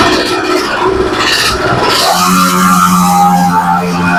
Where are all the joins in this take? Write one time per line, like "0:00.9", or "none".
none